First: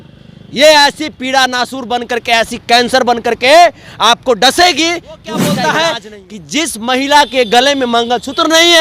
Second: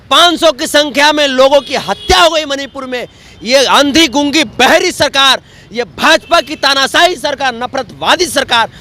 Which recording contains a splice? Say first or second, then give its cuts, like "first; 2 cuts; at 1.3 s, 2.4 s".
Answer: first; 1 cut; at 5.5 s